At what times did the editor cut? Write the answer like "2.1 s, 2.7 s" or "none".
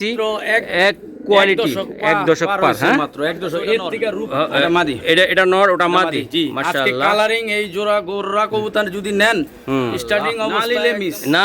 4.2 s, 10.6 s